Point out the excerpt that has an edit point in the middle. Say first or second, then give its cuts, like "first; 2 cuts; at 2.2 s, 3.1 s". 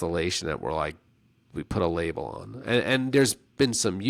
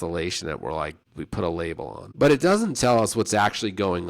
second; 2 cuts; at 1.1 s, 2.0 s